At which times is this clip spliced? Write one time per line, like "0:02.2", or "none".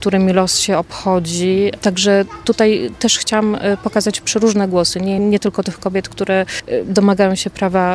0:01.8
0:05.2
0:06.6